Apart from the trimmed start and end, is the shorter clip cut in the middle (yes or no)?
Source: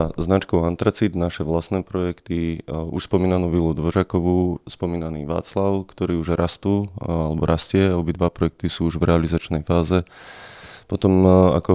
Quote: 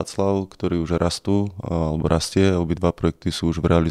no